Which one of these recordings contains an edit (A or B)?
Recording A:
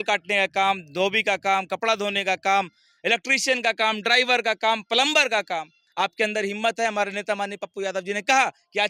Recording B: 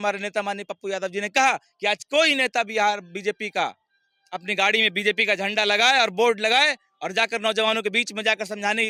A